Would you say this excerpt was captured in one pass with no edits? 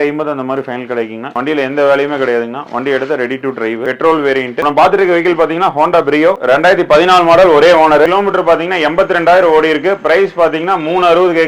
no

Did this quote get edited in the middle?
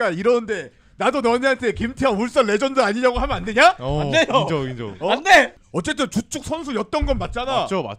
yes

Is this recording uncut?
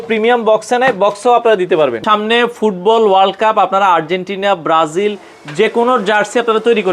no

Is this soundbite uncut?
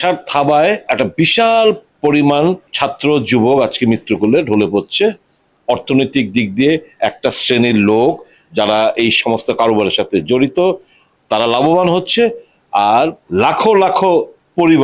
no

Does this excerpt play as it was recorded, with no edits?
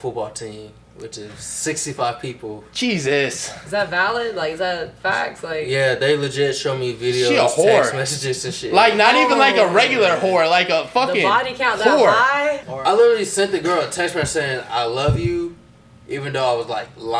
no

